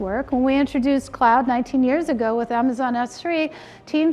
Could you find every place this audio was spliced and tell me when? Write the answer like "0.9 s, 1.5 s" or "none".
none